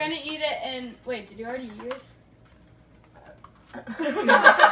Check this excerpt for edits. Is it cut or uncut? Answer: uncut